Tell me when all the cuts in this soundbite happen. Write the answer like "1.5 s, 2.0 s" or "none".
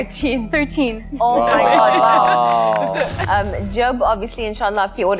3.2 s